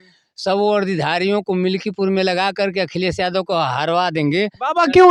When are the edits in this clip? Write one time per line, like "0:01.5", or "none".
none